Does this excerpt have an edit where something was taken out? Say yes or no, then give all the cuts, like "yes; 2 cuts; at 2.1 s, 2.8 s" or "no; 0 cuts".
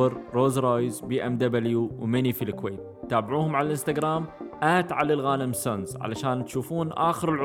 no; 0 cuts